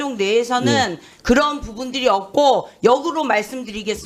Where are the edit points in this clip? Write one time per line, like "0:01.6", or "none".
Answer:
none